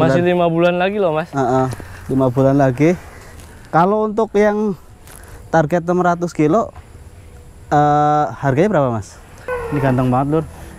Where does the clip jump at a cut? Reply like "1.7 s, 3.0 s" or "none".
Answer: 9.5 s